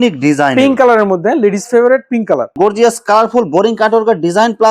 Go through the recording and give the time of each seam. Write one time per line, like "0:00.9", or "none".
0:02.5